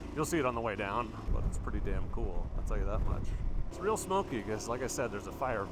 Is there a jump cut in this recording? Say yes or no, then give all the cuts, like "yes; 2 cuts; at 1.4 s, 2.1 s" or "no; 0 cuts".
yes; 2 cuts; at 1.2 s, 3.6 s